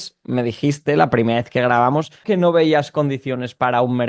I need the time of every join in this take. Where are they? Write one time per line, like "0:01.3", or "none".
0:02.2